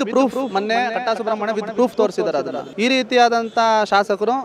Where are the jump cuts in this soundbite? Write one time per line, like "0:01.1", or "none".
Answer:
0:02.6